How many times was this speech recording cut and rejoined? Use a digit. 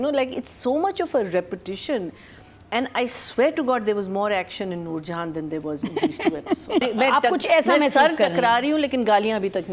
1